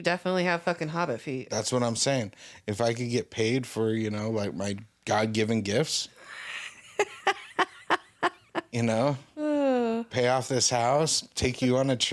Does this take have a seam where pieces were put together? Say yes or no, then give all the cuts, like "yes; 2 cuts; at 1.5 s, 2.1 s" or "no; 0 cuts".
no; 0 cuts